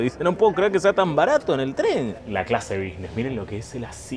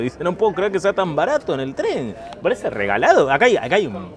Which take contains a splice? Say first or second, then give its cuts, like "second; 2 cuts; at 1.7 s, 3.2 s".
first; 1 cut; at 2.2 s